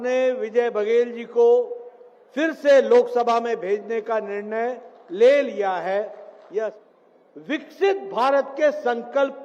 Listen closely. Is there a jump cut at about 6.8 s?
yes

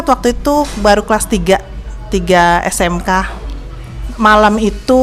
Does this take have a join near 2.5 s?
no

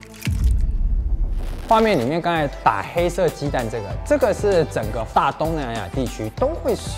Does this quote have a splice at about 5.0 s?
yes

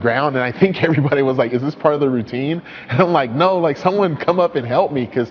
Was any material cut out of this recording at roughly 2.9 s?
no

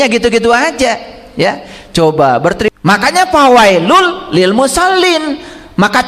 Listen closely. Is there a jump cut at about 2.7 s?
yes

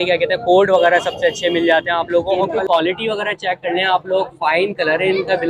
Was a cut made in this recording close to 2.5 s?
yes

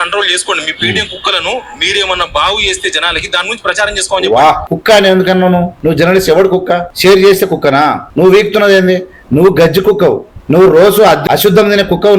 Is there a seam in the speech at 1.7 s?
no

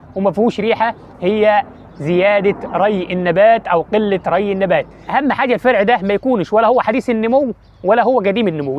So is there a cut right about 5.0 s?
yes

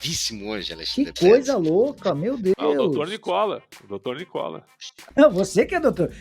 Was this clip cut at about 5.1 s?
yes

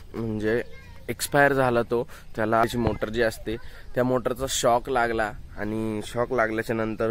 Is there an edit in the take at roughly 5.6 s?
no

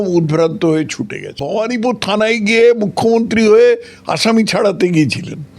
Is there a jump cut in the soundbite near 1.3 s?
yes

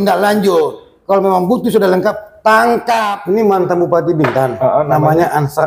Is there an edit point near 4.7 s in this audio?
no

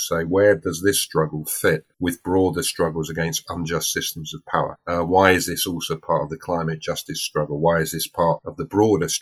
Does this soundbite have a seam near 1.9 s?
yes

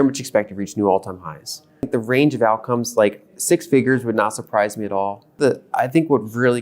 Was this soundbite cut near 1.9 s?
yes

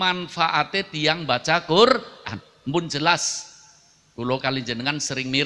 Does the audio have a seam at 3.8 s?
no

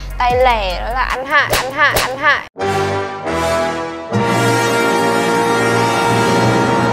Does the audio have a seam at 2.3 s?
no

